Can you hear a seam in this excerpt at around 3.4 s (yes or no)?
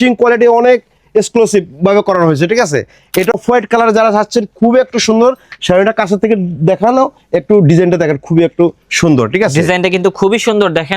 yes